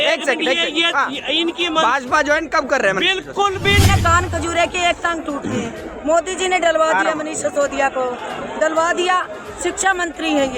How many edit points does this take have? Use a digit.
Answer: 1